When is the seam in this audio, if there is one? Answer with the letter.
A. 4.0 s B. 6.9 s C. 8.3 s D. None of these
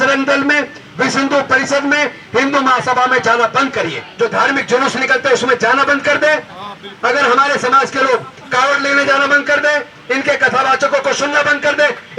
A